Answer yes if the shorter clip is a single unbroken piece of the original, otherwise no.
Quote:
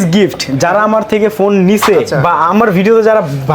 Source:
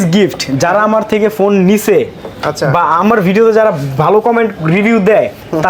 no